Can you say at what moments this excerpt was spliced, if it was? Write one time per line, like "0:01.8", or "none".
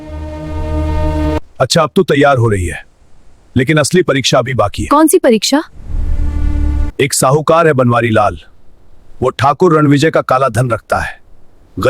0:01.4
0:06.9

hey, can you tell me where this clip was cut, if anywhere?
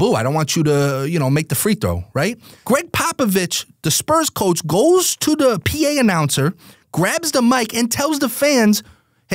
0:02.5

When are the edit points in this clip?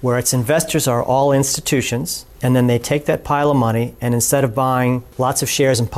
none

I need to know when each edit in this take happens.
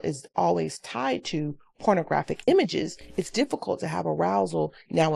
0:02.4

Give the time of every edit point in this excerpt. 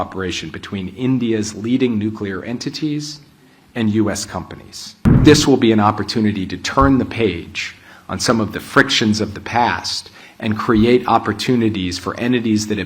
0:05.2

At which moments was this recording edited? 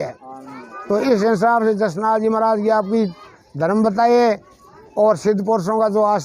none

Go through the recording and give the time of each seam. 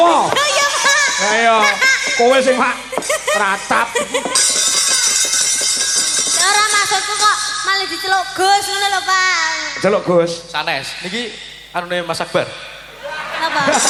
none

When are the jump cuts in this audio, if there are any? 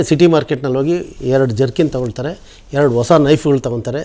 none

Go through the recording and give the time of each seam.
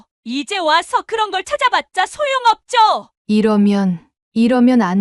0:03.1

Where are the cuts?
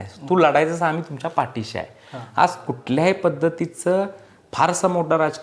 none

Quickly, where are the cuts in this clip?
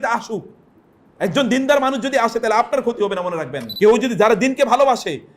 0:03.6

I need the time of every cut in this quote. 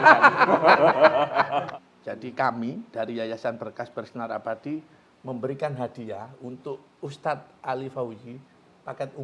0:01.7

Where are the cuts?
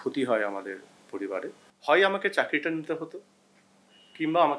0:01.6

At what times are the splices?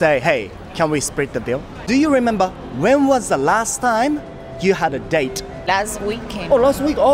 0:01.7

